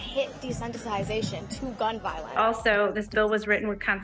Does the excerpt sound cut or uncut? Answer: cut